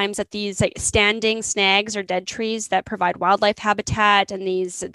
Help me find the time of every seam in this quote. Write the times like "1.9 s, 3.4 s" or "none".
none